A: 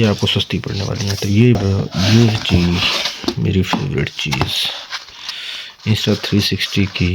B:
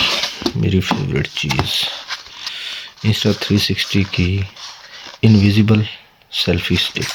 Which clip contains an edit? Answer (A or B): A